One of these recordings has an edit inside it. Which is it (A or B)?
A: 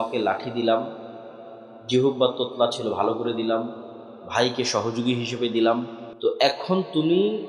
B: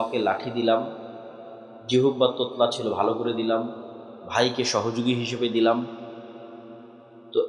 A